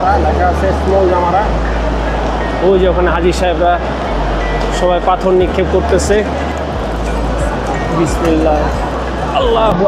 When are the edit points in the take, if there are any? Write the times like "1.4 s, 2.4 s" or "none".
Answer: 6.5 s